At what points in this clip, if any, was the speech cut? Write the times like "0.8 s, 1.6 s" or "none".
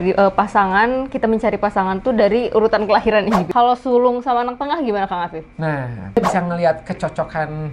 3.5 s, 6.2 s

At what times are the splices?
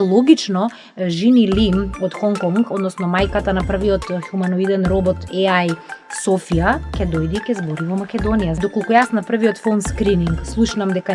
8.5 s

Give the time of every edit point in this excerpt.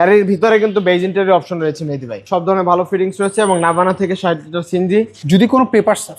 2.2 s, 5.2 s

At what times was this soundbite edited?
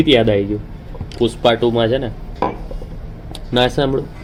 none

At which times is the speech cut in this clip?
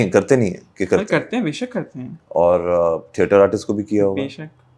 none

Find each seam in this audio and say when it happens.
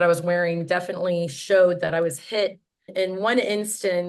2.9 s

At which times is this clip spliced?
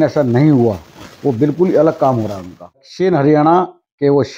2.9 s

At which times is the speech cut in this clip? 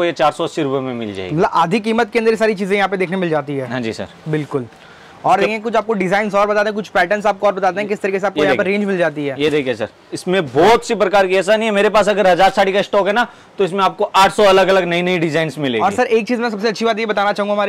none

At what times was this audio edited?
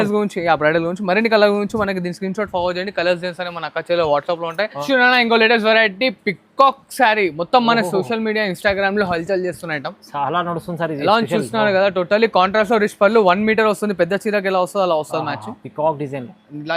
4.8 s

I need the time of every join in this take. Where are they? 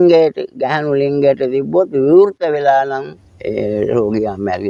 none

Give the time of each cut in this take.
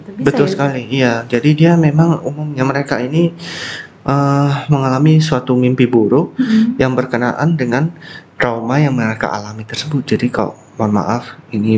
none

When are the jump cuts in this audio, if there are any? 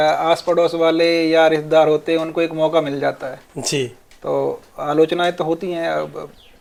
none

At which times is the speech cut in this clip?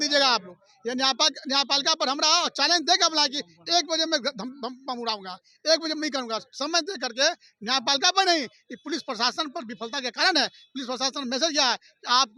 none

